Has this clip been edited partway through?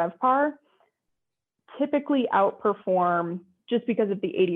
yes; 1 cut; at 3.5 s

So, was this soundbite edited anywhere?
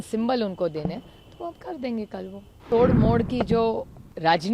yes; 1 cut; at 2.7 s

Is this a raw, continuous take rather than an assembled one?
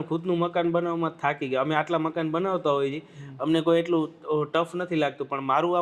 yes; 0 cuts

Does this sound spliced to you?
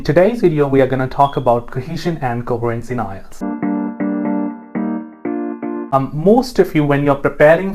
yes; 2 cuts; at 3.4 s, 5.9 s

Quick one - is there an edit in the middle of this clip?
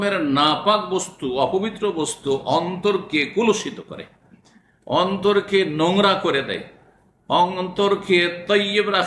no; 0 cuts

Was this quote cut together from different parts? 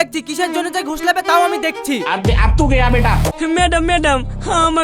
yes; 1 cut; at 3.3 s

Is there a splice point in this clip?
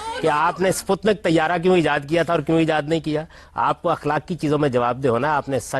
no; 0 cuts

